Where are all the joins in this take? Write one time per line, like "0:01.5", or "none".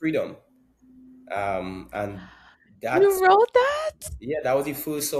none